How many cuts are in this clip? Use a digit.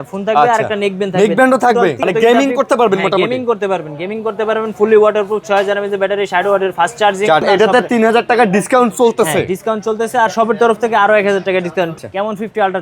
3